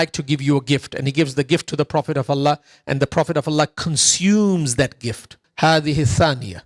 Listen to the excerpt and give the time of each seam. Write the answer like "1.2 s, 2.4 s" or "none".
5.4 s